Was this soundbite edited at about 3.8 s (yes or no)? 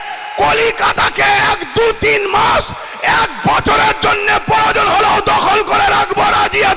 no